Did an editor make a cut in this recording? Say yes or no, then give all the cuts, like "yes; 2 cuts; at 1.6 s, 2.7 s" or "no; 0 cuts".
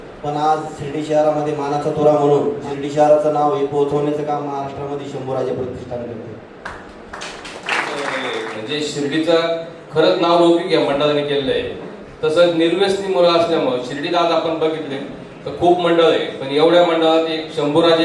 yes; 2 cuts; at 2.6 s, 8.1 s